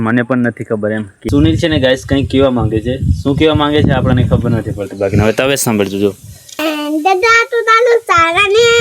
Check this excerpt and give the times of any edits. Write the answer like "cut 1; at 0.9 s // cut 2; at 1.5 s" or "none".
cut 1; at 1.1 s // cut 2; at 6.6 s